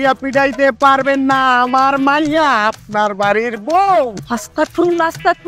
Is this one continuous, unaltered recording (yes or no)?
yes